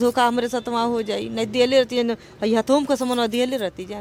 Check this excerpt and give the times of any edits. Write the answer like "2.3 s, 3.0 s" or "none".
none

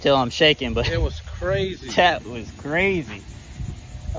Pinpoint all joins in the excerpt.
none

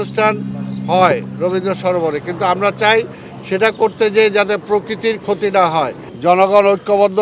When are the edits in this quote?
6.0 s

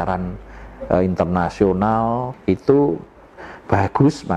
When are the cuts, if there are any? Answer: 2.3 s

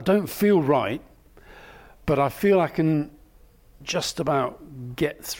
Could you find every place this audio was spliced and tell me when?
3.7 s

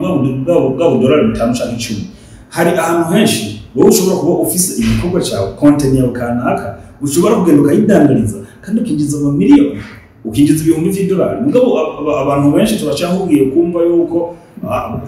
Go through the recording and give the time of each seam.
none

